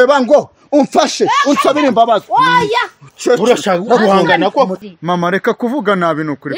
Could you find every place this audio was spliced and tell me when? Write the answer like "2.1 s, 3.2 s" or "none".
4.8 s